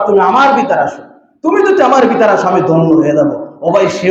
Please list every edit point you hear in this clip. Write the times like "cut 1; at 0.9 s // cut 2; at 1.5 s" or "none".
none